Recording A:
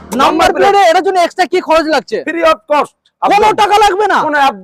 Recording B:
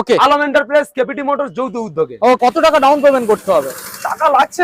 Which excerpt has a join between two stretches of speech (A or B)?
B